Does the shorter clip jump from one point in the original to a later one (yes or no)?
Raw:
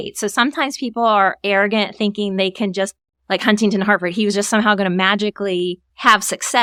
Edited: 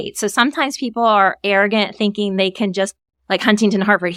no